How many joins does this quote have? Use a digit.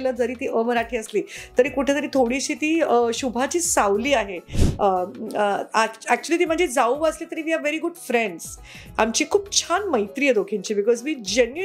1